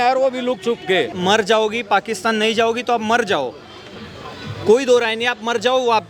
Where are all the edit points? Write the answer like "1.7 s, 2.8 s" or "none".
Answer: 1.1 s

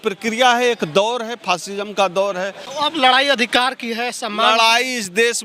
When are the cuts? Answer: 2.6 s

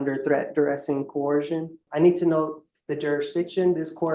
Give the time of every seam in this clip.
1.8 s

